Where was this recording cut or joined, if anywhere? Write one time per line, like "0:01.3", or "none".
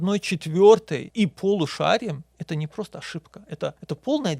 none